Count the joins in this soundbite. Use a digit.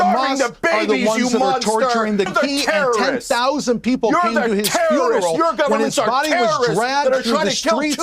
1